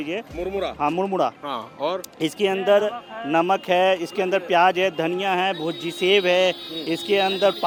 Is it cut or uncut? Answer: uncut